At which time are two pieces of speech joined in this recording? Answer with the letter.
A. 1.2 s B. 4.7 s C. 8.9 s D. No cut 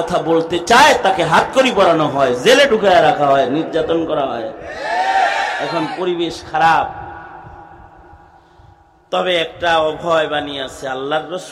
C